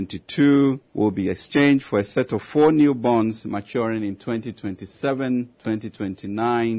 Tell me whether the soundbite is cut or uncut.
cut